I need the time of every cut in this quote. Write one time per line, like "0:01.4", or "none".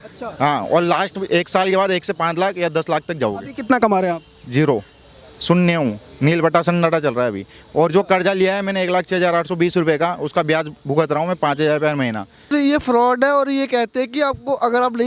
0:12.5